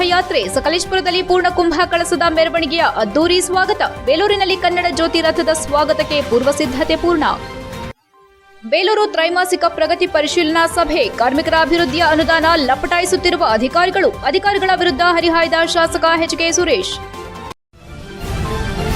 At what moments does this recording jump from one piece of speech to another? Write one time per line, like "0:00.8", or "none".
0:17.4